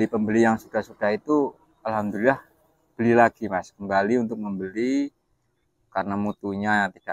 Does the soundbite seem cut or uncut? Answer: uncut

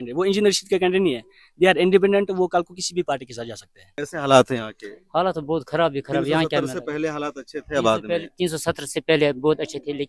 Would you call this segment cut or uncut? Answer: cut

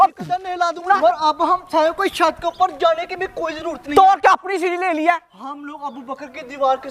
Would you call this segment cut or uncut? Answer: cut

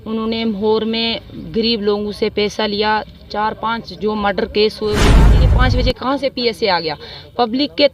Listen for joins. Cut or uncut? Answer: cut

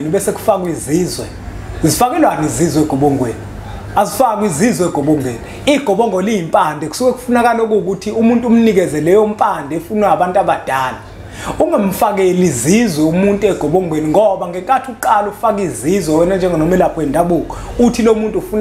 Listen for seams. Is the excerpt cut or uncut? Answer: uncut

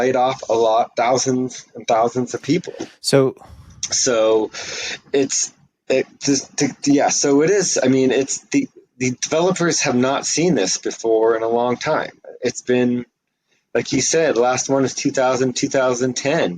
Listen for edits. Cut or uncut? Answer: uncut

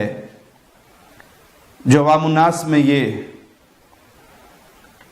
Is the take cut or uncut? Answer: uncut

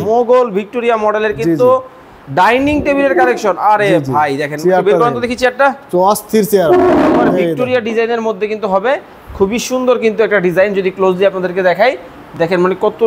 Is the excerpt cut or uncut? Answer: uncut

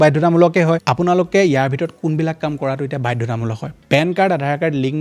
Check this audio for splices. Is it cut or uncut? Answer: cut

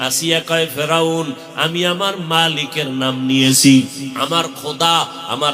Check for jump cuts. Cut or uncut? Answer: cut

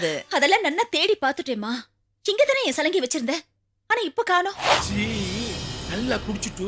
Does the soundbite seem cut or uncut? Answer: cut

